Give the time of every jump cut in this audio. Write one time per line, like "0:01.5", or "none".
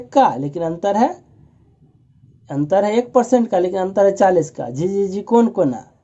none